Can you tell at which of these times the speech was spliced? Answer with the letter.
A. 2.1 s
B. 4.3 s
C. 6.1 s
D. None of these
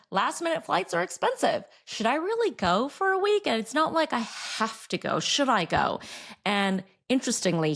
D